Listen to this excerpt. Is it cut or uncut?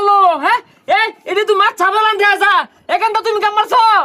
uncut